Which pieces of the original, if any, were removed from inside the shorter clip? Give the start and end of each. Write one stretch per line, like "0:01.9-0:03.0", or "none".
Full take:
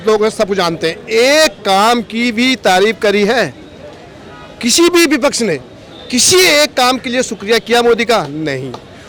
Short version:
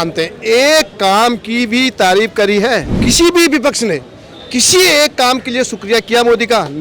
0:03.6-0:04.5